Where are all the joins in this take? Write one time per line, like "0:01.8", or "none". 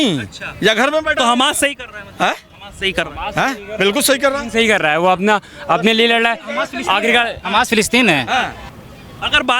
0:08.6